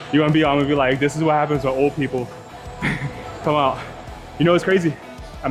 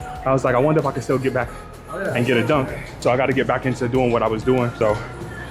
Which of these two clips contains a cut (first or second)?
second